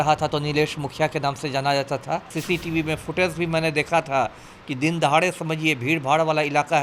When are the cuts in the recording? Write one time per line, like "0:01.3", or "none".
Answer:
0:02.3